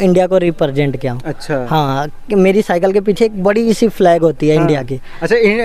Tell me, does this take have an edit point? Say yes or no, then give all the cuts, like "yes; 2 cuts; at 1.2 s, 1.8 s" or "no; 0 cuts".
no; 0 cuts